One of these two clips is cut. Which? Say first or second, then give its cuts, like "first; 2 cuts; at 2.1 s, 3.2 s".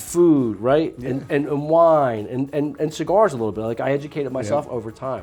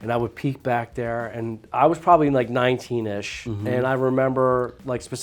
second; 1 cut; at 1.6 s